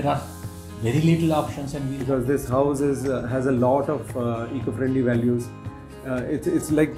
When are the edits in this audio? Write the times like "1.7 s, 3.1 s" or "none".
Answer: 2.1 s